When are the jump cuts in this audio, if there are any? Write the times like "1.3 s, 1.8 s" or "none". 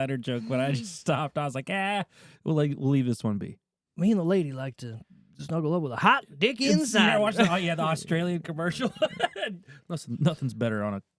none